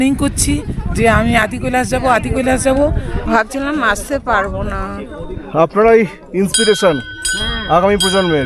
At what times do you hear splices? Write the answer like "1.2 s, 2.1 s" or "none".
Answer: 3.2 s